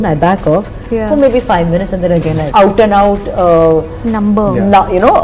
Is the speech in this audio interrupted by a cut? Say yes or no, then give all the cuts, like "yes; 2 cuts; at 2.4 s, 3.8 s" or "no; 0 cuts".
yes; 1 cut; at 2.4 s